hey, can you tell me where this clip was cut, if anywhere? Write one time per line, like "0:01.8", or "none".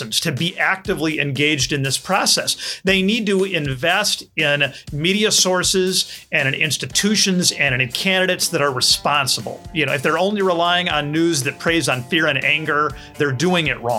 none